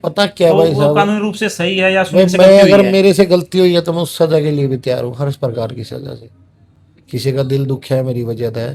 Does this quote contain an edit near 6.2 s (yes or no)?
no